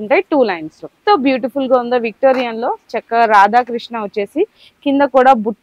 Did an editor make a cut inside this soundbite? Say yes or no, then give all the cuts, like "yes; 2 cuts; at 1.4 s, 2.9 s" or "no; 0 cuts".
yes; 1 cut; at 1.0 s